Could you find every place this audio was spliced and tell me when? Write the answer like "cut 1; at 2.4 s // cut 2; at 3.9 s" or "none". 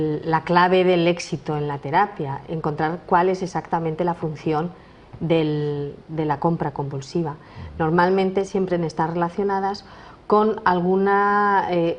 none